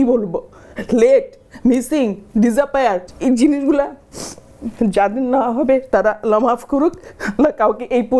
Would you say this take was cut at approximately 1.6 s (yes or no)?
no